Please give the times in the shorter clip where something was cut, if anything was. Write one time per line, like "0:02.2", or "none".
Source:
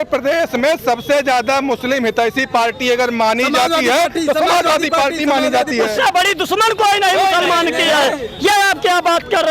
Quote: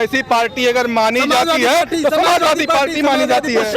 none